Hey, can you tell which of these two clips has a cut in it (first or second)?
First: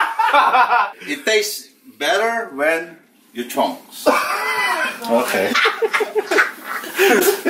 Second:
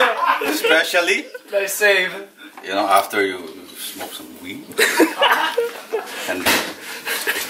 first